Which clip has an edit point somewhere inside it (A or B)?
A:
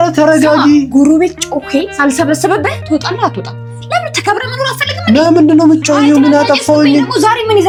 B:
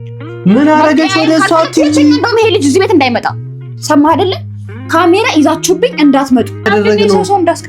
B